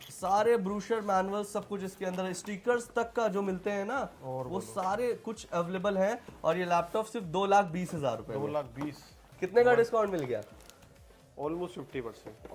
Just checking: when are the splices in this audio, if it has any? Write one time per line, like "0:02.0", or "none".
none